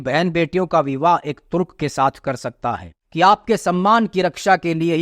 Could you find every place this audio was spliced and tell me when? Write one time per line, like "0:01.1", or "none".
0:03.0